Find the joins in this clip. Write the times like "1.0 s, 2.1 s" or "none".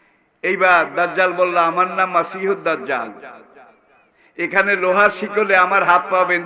none